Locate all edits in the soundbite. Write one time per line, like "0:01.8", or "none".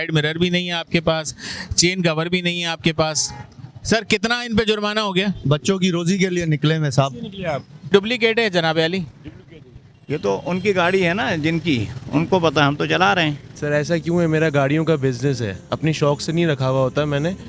0:05.4
0:07.9
0:13.5

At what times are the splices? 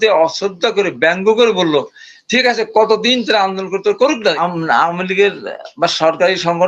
0:04.4

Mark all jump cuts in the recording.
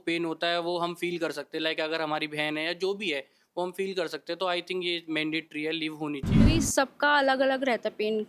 0:06.4

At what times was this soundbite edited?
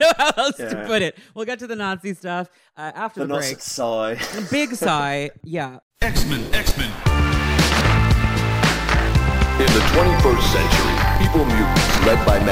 0:05.8

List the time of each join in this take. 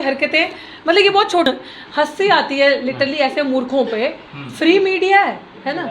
0:01.5

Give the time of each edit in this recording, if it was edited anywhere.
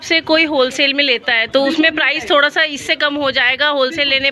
none

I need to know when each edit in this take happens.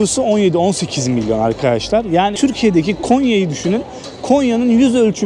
0:02.3

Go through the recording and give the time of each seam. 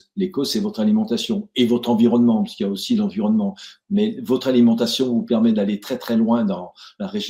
none

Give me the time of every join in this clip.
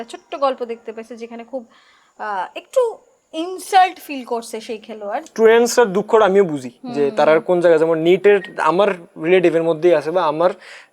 0:05.3

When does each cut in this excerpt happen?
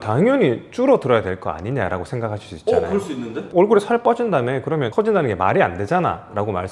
0:03.5

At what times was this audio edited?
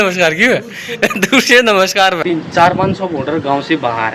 0:02.2

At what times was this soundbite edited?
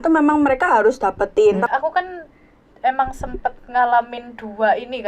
0:01.7

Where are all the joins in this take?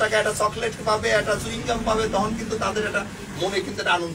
none

